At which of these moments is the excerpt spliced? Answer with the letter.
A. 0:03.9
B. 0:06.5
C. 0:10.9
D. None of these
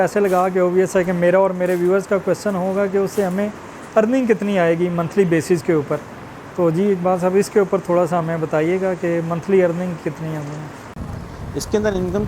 C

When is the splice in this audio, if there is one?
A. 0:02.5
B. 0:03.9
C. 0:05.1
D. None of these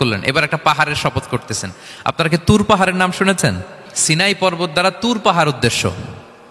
B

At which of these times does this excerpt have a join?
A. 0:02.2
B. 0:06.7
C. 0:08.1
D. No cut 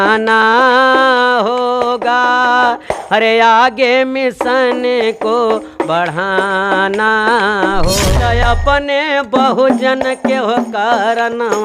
C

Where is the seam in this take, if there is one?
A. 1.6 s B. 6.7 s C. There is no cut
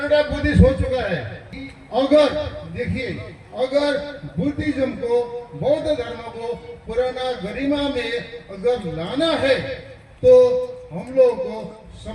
A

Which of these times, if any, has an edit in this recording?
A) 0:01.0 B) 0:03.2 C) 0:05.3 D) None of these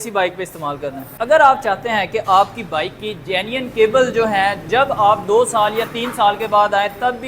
A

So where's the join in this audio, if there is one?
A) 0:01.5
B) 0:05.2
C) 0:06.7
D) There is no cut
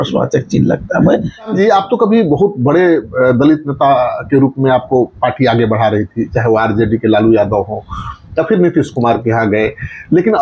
A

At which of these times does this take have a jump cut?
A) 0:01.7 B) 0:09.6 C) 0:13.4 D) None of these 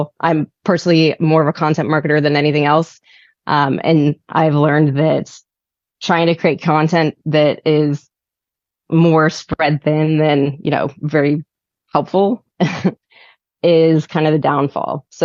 D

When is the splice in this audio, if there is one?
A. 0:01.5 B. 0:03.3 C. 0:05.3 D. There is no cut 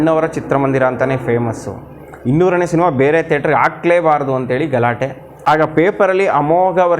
C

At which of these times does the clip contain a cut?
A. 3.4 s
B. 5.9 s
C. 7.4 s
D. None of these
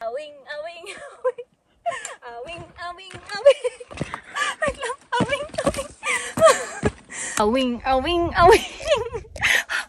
C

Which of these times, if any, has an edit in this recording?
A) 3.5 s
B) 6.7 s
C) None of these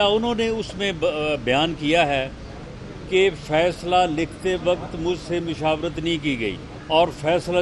B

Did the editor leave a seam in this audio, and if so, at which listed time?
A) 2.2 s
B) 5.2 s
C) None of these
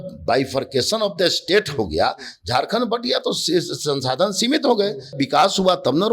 B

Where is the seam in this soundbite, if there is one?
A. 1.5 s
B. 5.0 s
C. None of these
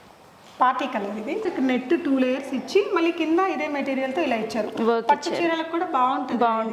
A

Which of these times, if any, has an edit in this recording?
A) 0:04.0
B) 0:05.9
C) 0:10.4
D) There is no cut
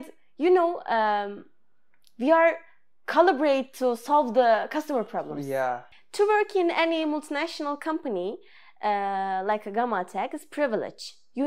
B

